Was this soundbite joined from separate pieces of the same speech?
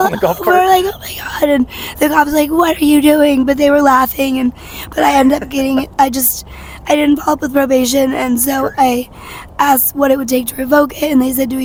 no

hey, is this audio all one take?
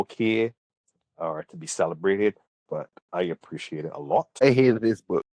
no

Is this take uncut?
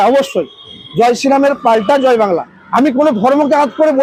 yes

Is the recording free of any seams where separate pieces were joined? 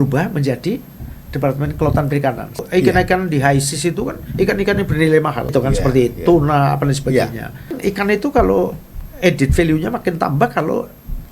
no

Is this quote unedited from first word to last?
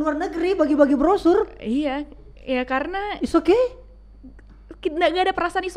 yes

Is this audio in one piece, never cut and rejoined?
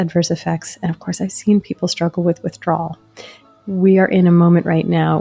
no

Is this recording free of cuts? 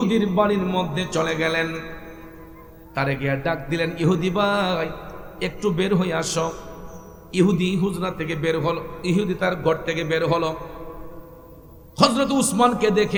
yes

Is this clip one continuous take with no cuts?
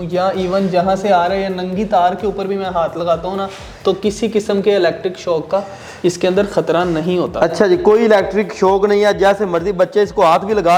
yes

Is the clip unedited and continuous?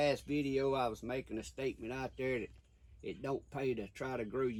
yes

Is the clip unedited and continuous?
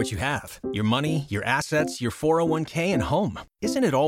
yes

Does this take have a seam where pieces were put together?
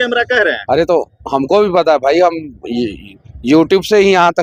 no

